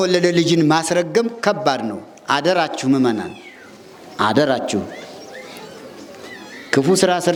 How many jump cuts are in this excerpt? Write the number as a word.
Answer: zero